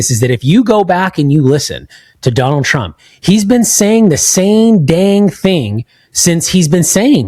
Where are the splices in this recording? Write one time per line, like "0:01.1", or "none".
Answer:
none